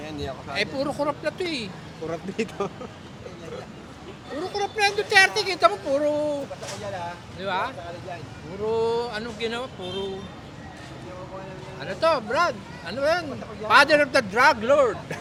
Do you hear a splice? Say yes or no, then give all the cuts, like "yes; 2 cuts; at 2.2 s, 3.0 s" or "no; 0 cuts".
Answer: no; 0 cuts